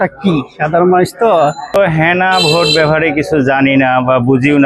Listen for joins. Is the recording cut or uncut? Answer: cut